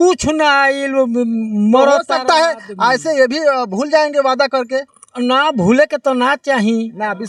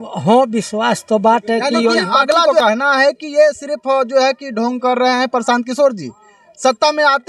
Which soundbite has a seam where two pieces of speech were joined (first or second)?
second